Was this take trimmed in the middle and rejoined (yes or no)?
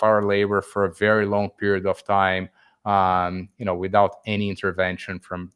no